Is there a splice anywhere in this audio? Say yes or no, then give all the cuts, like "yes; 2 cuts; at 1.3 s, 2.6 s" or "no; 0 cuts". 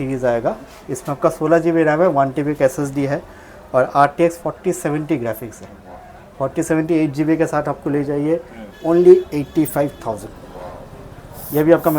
no; 0 cuts